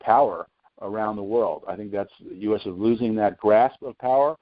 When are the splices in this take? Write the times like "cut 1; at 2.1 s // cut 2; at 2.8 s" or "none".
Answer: none